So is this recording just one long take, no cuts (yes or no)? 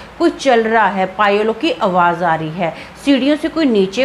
yes